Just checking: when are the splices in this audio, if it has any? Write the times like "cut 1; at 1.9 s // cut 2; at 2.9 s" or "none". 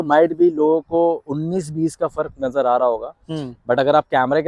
none